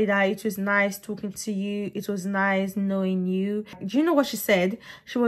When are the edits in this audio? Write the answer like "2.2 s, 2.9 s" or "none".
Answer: 3.8 s